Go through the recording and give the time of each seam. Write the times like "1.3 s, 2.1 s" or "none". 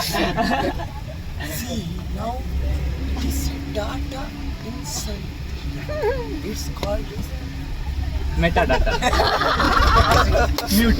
9.6 s